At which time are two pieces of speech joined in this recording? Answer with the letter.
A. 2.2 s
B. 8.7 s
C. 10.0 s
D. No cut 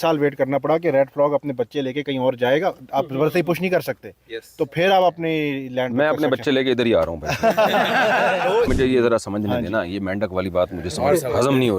B